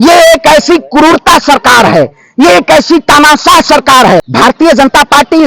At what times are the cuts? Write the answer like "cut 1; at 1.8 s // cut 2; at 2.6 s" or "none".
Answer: cut 1; at 4.3 s